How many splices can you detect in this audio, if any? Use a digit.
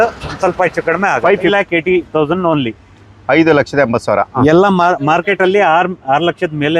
1